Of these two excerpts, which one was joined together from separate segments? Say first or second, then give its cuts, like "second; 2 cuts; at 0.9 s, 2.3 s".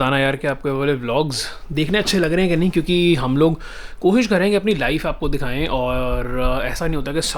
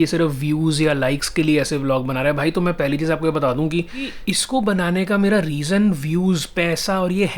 second; 1 cut; at 4.2 s